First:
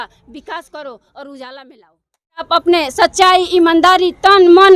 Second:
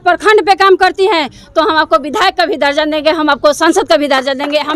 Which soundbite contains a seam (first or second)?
first